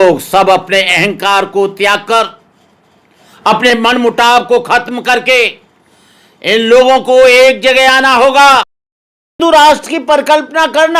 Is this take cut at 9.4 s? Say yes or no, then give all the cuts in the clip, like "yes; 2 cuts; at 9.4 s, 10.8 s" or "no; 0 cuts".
yes; 1 cut; at 9.4 s